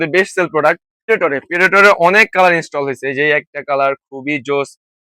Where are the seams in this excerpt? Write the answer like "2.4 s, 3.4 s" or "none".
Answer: 1.0 s